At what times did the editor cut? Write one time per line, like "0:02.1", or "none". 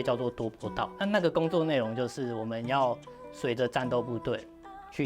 0:00.9